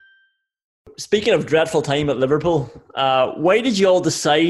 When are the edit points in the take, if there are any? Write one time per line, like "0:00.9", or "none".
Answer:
0:00.9